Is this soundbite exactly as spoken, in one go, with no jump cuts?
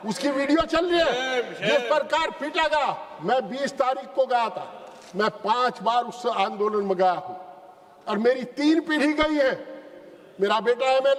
yes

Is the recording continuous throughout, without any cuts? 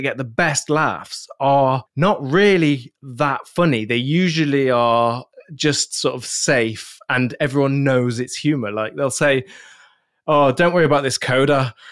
no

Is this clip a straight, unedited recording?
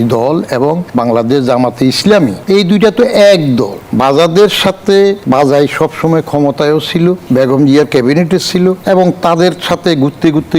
no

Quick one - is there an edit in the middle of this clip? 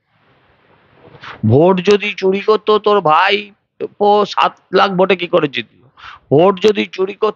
no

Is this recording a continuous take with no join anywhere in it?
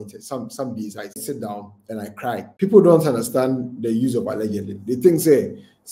no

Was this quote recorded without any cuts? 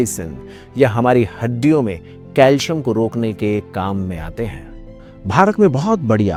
yes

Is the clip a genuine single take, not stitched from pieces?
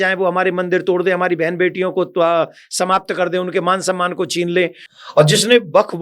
no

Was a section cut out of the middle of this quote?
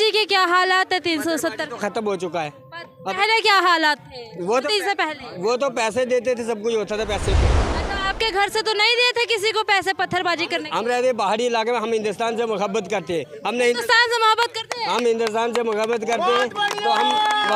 no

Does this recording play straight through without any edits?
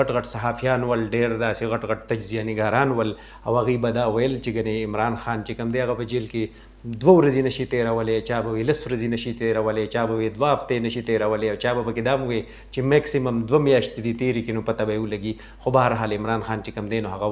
yes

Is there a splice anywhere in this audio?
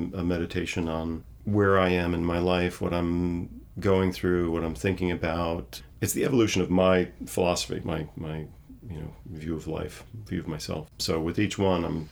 yes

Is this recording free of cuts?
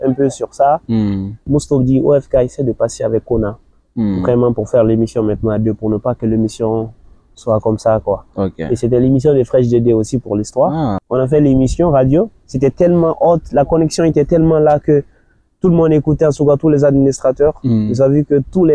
no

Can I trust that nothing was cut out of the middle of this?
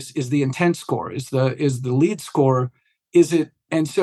yes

